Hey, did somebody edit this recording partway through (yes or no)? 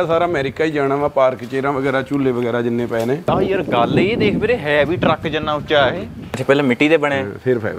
yes